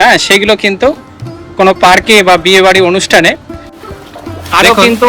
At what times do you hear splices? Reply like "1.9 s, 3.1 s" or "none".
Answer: 3.8 s